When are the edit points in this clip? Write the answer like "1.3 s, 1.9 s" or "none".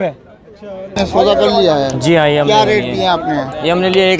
0.9 s